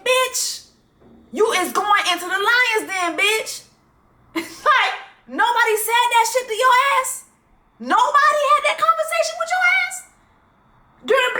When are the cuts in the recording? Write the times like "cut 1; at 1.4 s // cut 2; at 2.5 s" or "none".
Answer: none

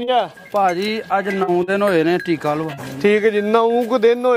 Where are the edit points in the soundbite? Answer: none

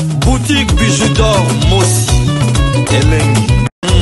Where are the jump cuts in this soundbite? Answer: cut 1; at 1.3 s // cut 2; at 2.9 s

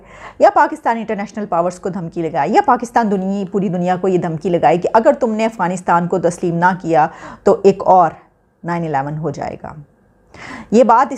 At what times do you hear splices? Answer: none

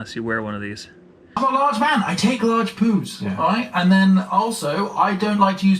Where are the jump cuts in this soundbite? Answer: cut 1; at 1.3 s

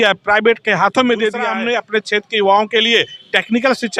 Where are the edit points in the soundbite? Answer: cut 1; at 1.5 s

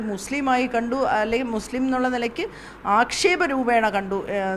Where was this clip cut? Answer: none

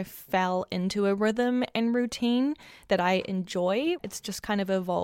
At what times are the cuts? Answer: cut 1; at 4.0 s

